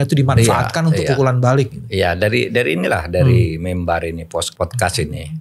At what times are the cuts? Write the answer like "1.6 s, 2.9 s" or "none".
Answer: 4.5 s